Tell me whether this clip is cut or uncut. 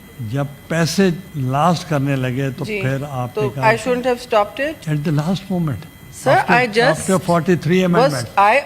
cut